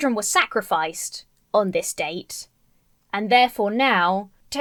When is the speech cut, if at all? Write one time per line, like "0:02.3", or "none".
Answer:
none

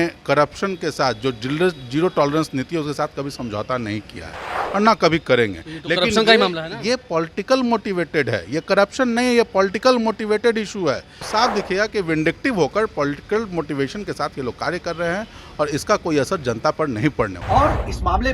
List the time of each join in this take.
0:11.2
0:17.4

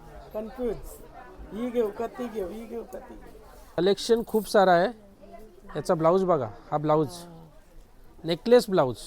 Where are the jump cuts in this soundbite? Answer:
0:03.8

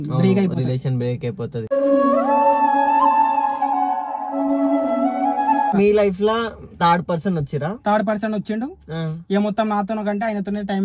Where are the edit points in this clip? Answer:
0:05.7

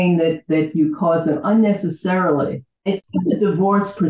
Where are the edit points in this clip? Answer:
0:03.0

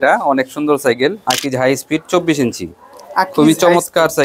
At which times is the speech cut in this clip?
0:01.2

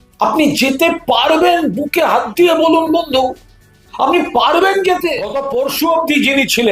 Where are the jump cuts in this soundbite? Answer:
0:05.4

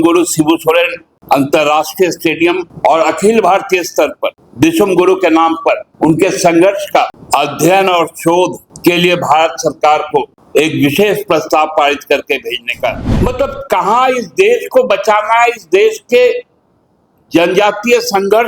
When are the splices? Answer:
0:01.1
0:02.7
0:04.4
0:05.9
0:07.2
0:08.7
0:10.4
0:13.1

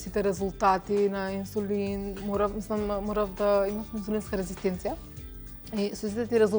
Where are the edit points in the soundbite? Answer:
none

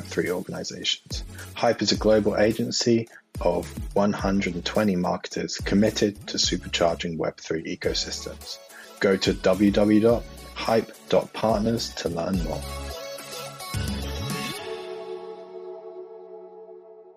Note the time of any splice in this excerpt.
0:12.6

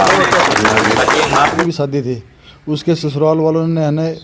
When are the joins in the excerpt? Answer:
0:01.6

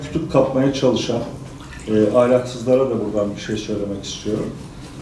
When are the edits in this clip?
none

